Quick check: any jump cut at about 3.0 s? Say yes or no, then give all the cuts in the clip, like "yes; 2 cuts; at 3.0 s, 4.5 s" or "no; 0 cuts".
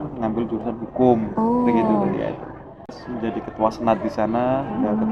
yes; 1 cut; at 3.0 s